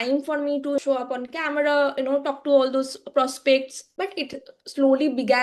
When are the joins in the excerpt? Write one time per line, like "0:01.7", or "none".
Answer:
0:00.8
0:03.8